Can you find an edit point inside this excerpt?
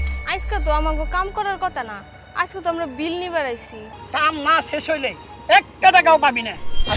yes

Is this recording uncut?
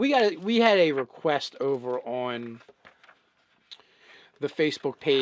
yes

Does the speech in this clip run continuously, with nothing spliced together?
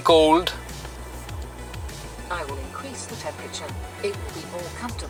yes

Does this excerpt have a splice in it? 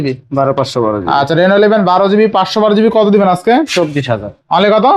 no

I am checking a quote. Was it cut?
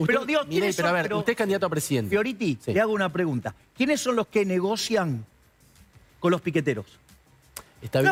no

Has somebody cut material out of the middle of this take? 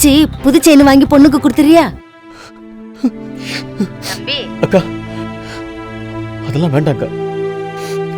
yes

